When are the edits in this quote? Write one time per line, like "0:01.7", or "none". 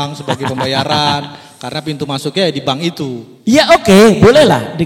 none